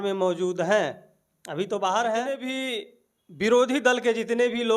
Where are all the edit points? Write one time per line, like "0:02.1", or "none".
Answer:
0:02.5